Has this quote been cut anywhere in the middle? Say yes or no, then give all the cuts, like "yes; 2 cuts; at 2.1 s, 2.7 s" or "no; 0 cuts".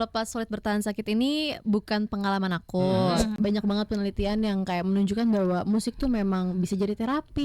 yes; 1 cut; at 3.4 s